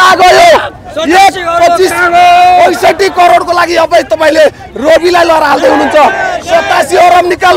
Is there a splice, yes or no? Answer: no